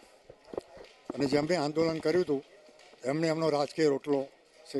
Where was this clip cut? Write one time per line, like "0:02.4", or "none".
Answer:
none